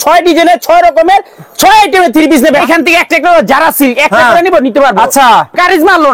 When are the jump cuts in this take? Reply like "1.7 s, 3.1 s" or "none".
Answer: 2.6 s